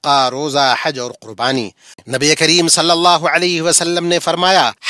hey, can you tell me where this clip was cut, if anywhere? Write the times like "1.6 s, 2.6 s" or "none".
2.0 s

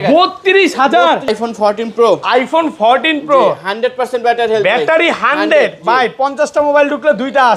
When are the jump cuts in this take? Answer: 1.3 s

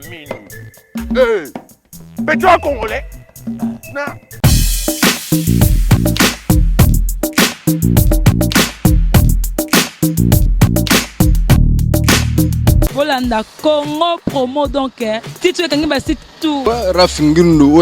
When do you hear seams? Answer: 12.9 s, 16.6 s

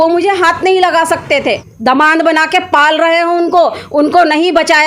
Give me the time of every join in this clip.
1.6 s

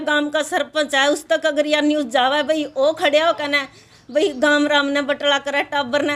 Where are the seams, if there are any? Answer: none

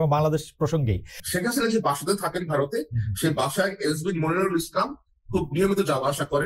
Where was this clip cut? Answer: 1.1 s

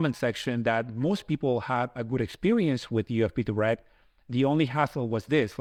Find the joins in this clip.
none

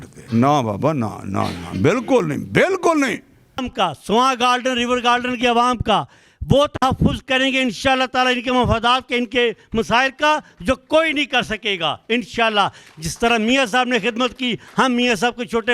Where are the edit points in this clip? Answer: 3.7 s

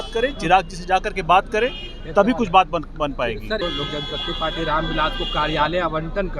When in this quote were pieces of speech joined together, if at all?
3.6 s

